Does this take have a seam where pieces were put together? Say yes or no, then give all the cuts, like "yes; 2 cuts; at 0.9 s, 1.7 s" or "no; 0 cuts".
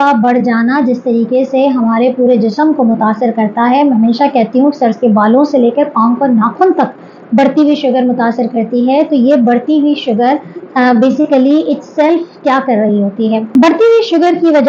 no; 0 cuts